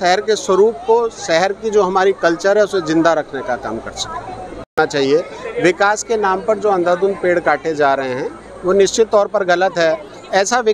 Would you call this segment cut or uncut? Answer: cut